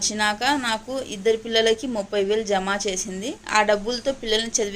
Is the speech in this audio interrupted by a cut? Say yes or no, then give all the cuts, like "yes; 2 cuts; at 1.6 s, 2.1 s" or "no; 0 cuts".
yes; 1 cut; at 3.3 s